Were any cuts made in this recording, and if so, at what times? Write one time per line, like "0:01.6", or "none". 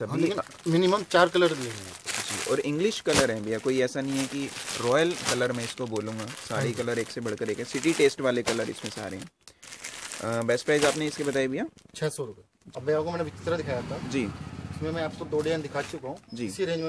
none